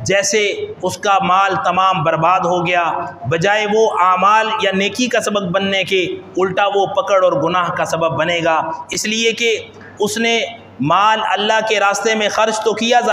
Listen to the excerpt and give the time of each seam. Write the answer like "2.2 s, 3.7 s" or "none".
none